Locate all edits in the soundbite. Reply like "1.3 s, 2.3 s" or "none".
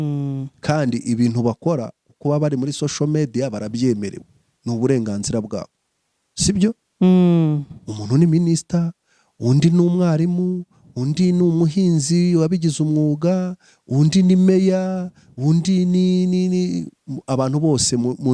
none